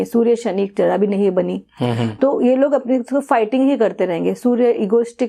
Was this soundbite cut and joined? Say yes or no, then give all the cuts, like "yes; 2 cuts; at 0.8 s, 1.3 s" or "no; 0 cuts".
no; 0 cuts